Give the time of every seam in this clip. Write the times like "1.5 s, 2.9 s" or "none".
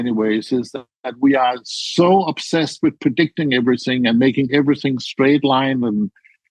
none